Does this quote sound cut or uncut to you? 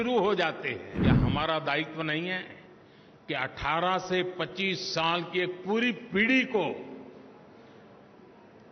cut